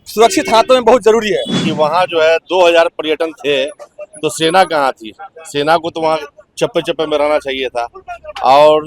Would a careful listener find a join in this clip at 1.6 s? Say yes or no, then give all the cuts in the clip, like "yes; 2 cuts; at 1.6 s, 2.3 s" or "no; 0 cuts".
yes; 1 cut; at 1.6 s